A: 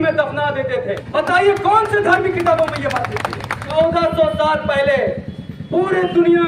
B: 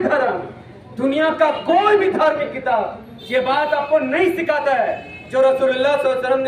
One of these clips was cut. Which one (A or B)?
A